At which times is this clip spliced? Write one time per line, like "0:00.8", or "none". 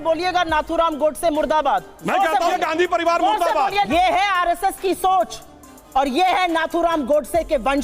0:02.5
0:03.9